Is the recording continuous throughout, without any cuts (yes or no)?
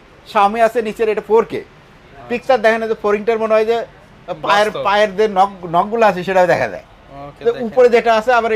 yes